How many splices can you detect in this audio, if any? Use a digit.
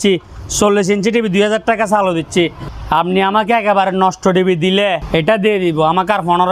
2